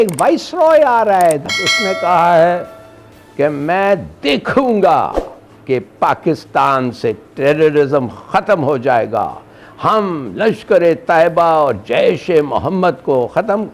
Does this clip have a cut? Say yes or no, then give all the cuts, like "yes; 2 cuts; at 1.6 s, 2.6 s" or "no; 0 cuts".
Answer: yes; 1 cut; at 1.4 s